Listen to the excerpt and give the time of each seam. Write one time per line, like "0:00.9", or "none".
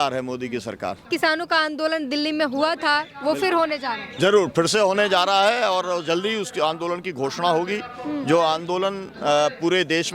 0:01.1